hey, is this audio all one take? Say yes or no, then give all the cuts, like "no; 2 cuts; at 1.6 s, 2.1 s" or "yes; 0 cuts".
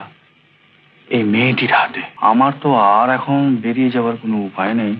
no; 1 cut; at 2.0 s